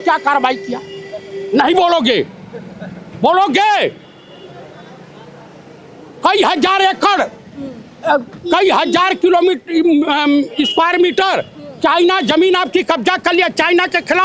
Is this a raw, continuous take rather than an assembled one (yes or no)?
yes